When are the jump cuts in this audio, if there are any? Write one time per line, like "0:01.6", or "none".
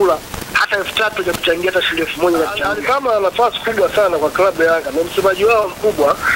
0:02.6